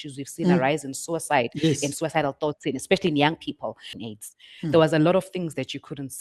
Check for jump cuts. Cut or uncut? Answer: cut